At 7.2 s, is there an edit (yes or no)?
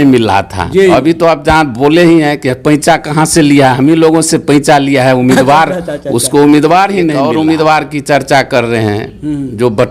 yes